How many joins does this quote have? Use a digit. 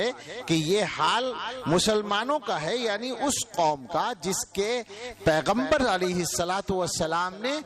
0